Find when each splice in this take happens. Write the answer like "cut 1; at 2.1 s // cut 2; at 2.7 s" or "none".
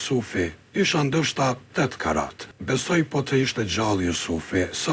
cut 1; at 2.5 s